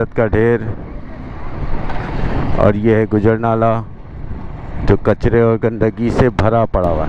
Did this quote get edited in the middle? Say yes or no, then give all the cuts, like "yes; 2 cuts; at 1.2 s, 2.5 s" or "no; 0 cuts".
no; 0 cuts